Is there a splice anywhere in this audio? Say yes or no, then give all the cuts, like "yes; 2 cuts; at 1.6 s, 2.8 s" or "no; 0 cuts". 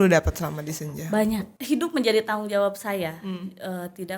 yes; 1 cut; at 1.5 s